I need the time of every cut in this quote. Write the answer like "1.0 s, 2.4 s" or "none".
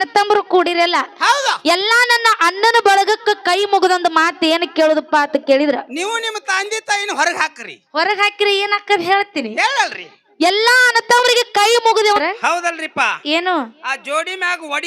12.2 s